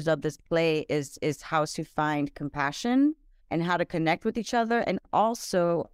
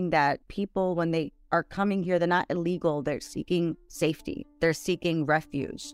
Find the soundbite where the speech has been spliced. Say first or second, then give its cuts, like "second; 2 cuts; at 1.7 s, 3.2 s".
first; 1 cut; at 3.3 s